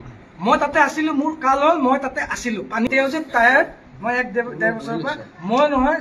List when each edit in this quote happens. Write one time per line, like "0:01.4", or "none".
0:02.9